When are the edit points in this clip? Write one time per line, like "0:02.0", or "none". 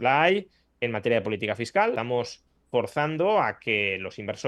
0:02.0

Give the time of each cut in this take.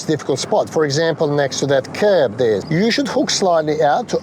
0:02.6

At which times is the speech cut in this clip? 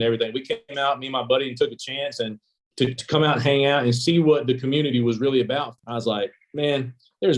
0:05.8

